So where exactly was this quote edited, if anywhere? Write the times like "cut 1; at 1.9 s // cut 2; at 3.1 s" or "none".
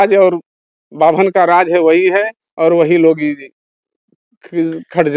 none